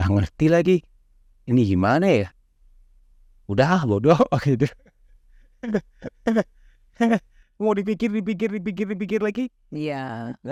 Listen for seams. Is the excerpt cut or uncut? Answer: uncut